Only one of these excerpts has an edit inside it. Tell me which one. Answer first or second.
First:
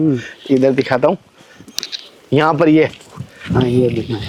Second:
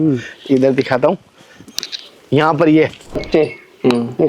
second